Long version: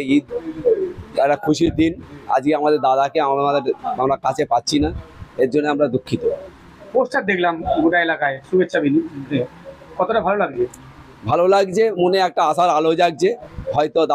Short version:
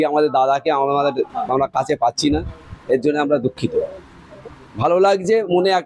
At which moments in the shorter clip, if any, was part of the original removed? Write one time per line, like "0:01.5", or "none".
0:04.3